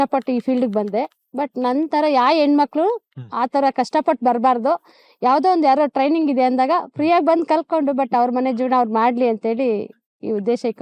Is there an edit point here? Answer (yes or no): no